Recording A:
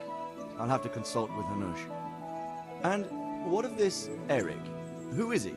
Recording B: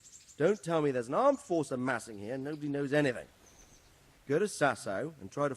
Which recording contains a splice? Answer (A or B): A